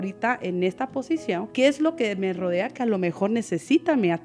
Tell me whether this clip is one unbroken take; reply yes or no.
yes